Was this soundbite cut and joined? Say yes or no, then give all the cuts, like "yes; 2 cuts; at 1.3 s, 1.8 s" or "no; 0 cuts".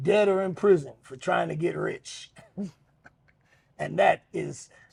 no; 0 cuts